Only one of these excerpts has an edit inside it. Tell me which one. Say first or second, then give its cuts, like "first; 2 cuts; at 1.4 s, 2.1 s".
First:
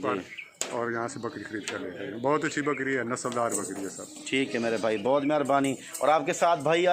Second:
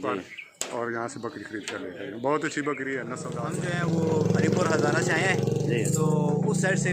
second; 1 cut; at 3.4 s